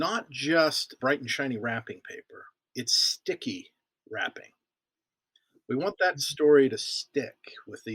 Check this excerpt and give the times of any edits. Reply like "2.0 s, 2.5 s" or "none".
0.9 s, 2.6 s